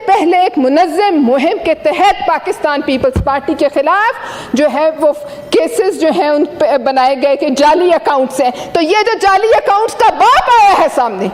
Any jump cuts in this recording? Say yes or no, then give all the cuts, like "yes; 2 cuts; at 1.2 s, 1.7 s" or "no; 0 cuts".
no; 0 cuts